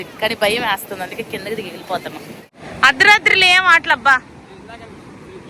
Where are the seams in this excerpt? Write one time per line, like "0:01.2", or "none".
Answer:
0:02.5